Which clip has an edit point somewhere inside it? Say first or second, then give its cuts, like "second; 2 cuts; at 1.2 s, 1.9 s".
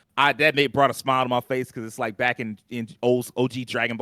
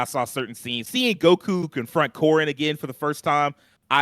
second; 2 cuts; at 0.8 s, 1.8 s